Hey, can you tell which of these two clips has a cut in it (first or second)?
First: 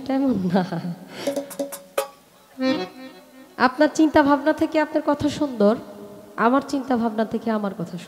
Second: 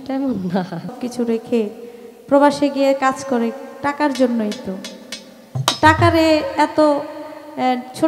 second